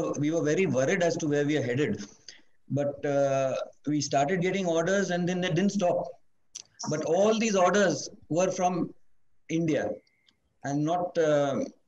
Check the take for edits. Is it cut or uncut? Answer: uncut